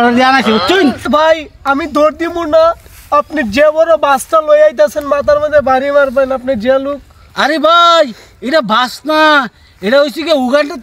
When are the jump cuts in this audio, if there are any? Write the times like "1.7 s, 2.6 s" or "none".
1.0 s